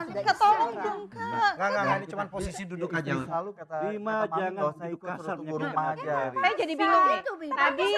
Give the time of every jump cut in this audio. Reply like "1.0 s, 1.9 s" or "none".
3.3 s